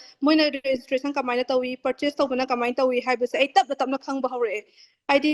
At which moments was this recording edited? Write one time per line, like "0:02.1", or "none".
none